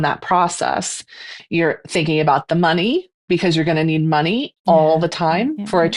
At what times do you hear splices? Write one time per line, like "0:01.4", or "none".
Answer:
0:01.4
0:03.1